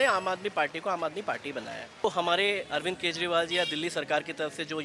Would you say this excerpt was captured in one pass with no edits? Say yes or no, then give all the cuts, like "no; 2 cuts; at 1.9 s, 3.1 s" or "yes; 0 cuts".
no; 1 cut; at 2.0 s